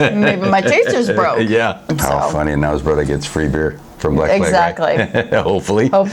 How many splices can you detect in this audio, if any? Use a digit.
1